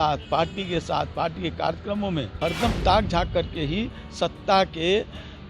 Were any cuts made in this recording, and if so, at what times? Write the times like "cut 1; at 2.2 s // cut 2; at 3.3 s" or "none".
cut 1; at 2.3 s

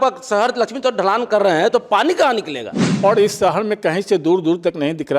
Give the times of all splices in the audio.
cut 1; at 2.9 s

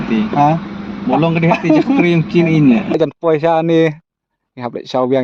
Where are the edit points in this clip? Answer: cut 1; at 3.0 s

